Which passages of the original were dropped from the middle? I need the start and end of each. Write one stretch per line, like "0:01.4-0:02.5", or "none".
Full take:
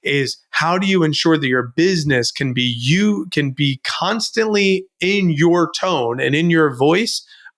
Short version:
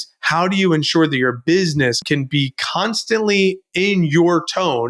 0:02.3-0:03.3